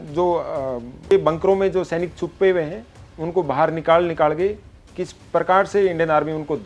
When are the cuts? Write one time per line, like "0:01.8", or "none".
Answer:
0:01.1